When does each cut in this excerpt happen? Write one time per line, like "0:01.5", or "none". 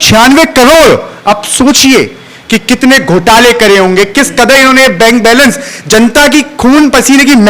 none